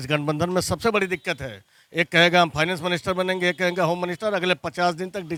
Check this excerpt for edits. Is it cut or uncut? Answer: uncut